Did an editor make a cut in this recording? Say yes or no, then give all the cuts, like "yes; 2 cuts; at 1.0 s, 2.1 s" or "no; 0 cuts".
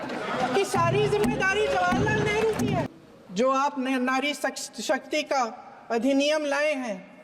yes; 1 cut; at 2.9 s